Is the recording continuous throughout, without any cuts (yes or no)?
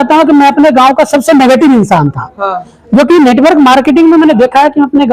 yes